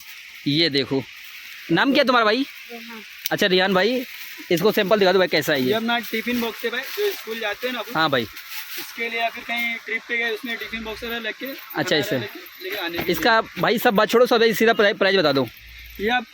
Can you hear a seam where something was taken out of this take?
no; 0 cuts

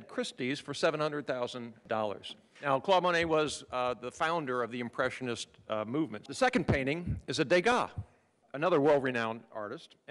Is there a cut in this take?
yes; 2 cuts; at 1.8 s, 6.2 s

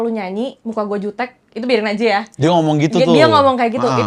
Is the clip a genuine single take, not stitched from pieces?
yes; 0 cuts

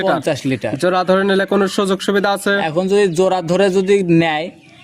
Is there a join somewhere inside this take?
no; 0 cuts

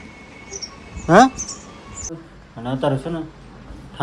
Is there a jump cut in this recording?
yes; 1 cut; at 2.3 s

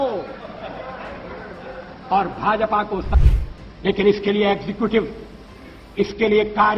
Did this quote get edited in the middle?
yes; 1 cut; at 3.2 s

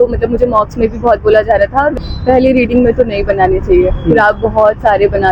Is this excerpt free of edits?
no; 1 cut; at 1.9 s

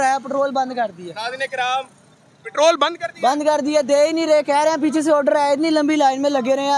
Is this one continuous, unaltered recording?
yes; 0 cuts

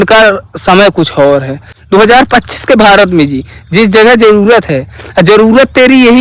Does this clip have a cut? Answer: yes; 1 cut; at 1.6 s

